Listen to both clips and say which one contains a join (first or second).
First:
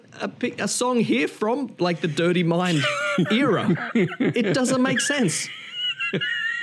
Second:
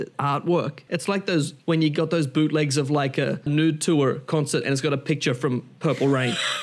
second